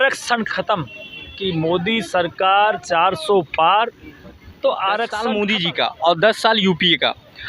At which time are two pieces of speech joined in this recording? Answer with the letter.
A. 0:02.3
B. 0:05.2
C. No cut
B